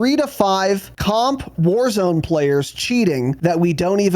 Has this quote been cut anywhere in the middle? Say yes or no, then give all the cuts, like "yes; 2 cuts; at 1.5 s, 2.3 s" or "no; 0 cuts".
yes; 2 cuts; at 0.9 s, 3.3 s